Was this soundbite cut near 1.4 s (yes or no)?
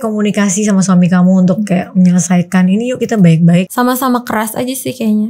no